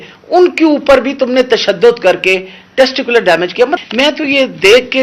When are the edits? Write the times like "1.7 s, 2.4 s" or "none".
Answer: 3.8 s